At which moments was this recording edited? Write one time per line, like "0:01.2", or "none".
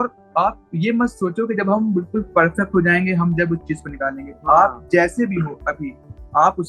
none